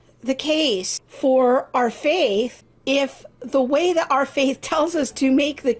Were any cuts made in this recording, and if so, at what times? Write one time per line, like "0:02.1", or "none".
0:01.0
0:02.7